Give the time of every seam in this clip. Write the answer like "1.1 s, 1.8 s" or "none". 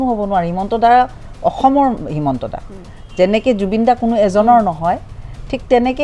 none